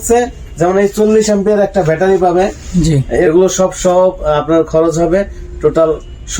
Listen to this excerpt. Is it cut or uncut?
cut